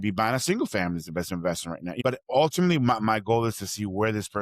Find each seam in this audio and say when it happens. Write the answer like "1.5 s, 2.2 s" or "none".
2.0 s